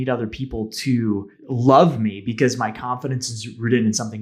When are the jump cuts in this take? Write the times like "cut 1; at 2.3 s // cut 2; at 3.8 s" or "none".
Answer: cut 1; at 1.4 s